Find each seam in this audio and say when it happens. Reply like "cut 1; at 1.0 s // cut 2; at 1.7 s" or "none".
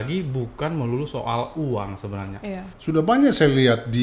cut 1; at 2.7 s

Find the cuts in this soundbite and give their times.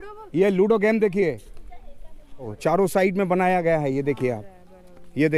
cut 1; at 2.5 s

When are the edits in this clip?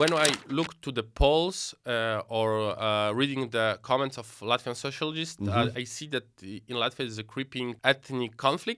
none

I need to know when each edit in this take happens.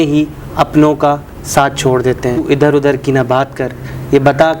cut 1; at 2.4 s

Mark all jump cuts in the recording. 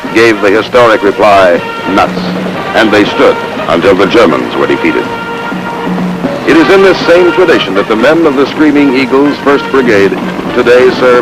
cut 1; at 2.2 s

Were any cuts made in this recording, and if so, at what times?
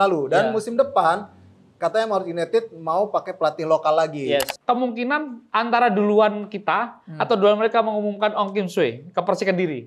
cut 1; at 4.5 s

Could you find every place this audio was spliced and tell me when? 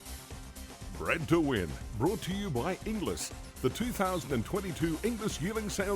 cut 1; at 1.0 s

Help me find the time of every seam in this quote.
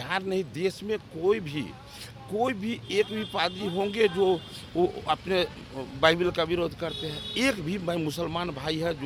none

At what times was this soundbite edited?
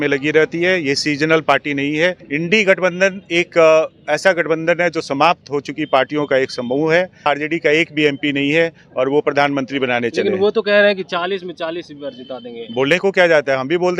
cut 1; at 2.2 s // cut 2; at 7.3 s

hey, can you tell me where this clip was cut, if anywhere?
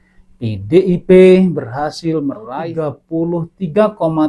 cut 1; at 2.6 s

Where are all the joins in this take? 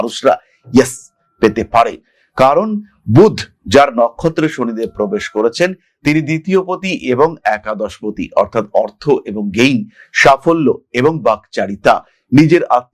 none

